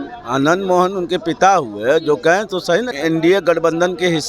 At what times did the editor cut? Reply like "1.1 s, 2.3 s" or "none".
2.9 s